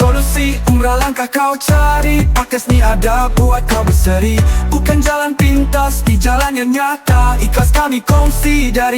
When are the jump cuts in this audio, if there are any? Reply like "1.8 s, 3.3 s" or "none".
none